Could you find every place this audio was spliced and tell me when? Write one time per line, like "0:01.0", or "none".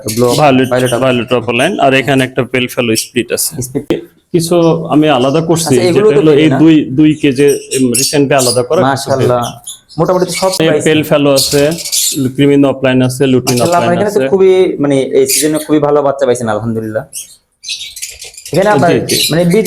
0:03.9
0:10.6